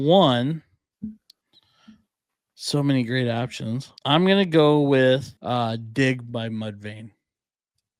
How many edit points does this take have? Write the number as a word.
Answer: two